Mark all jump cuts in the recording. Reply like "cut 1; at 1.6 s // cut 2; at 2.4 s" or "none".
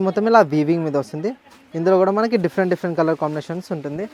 none